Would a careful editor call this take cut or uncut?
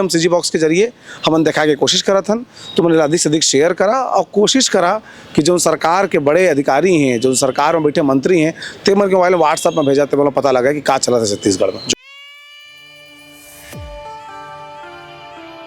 cut